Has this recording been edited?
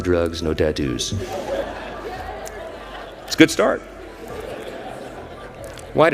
yes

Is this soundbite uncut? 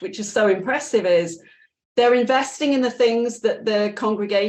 yes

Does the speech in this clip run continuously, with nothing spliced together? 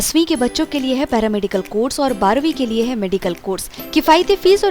yes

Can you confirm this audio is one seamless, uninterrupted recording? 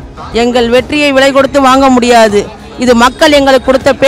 yes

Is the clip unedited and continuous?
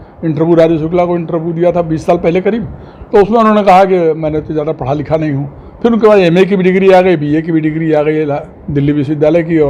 yes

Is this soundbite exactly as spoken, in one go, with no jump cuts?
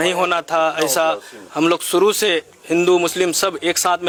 yes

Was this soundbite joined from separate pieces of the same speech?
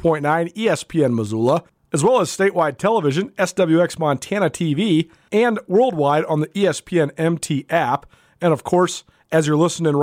yes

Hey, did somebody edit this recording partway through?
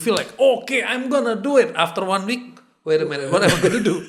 no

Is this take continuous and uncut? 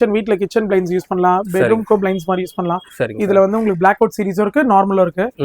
yes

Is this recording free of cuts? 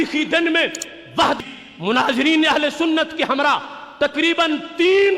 no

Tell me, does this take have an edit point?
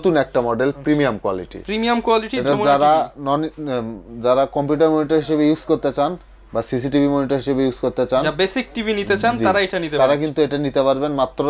no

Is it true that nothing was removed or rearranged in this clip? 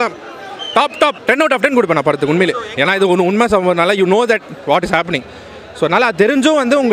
no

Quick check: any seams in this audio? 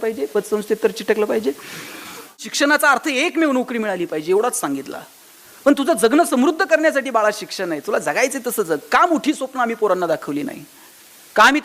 yes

